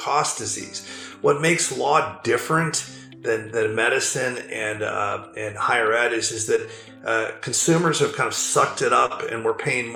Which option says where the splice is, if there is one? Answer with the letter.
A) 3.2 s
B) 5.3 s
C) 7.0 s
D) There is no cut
D